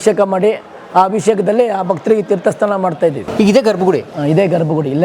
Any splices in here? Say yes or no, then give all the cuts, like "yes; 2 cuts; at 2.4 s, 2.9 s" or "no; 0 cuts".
yes; 1 cut; at 3.2 s